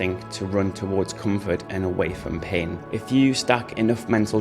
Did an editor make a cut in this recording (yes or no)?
yes